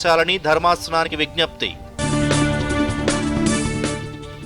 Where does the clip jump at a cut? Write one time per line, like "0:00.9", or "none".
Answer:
0:01.1